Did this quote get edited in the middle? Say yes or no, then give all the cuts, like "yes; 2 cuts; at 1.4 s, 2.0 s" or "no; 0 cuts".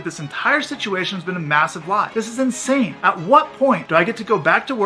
yes; 3 cuts; at 2.1 s, 3.0 s, 3.8 s